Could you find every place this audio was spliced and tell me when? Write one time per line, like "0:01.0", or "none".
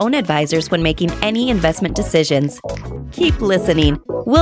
none